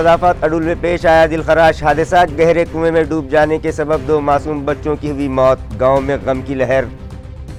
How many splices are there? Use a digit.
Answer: 0